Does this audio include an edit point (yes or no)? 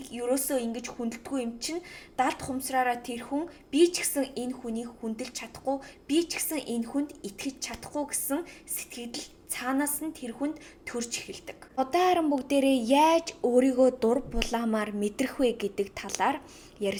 no